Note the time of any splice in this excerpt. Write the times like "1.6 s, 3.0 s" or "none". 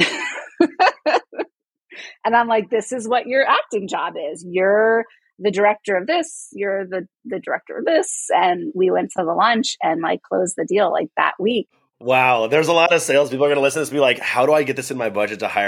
12.1 s